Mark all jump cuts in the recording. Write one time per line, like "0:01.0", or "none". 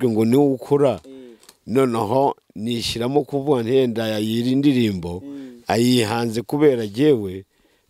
none